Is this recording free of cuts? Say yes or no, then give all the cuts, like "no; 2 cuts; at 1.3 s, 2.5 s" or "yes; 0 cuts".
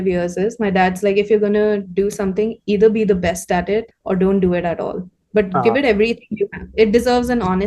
no; 1 cut; at 3.9 s